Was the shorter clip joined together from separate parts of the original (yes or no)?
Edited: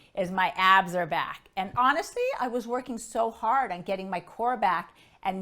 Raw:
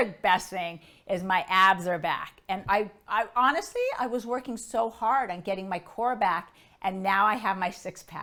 yes